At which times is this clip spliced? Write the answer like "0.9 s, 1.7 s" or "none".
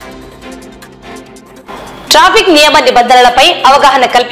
1.0 s